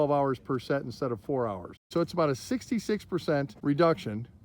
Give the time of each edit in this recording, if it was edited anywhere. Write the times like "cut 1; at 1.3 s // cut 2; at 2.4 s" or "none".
cut 1; at 1.9 s